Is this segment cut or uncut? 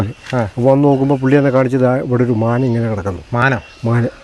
uncut